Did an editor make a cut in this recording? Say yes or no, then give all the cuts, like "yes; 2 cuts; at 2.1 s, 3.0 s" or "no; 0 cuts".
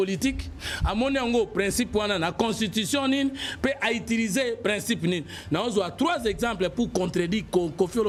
no; 0 cuts